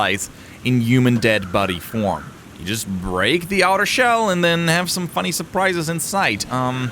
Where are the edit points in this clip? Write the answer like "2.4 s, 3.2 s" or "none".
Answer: none